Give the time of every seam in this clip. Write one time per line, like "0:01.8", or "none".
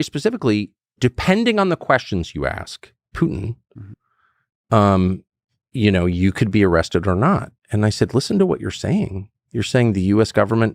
0:01.0